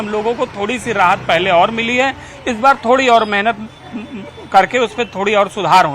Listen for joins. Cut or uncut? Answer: uncut